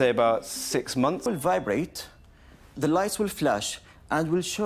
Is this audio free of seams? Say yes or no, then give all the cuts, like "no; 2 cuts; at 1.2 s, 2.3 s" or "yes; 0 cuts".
no; 1 cut; at 1.2 s